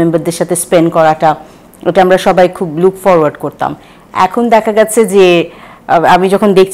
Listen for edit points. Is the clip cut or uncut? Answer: uncut